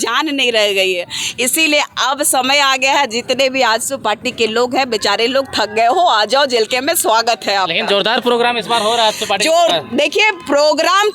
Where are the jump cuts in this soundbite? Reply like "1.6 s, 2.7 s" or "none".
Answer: none